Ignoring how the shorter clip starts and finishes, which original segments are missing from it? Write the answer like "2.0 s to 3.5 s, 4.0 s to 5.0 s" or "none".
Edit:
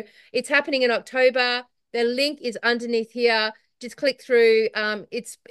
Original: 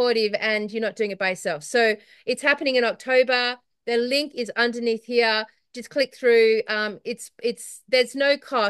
none